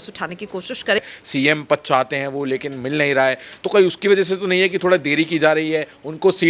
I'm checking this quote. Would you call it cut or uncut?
cut